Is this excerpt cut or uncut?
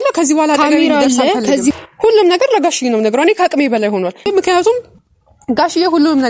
cut